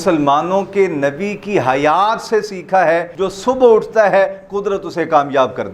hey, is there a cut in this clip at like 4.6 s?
no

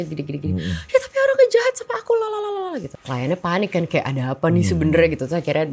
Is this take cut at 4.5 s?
no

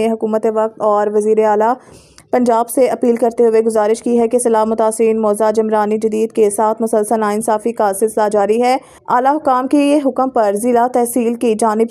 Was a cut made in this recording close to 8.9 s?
yes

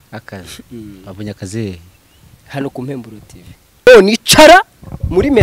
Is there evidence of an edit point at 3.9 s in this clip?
yes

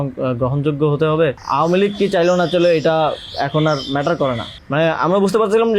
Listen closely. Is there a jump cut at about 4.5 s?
yes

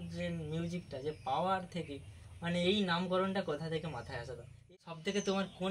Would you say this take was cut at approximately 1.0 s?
no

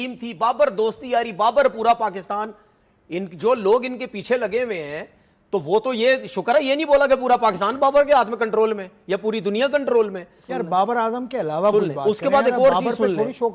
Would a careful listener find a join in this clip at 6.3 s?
no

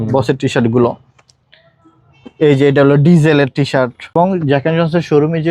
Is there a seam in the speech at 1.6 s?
no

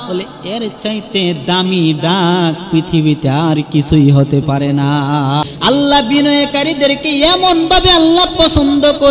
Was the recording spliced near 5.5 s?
yes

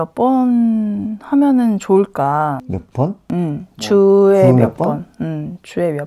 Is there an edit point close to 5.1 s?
no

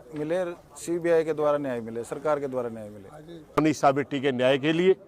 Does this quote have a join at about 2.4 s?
no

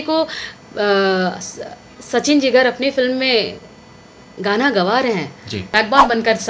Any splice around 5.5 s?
yes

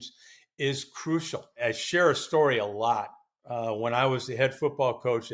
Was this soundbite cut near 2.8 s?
no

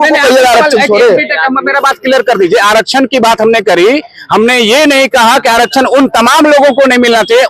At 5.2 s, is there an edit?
no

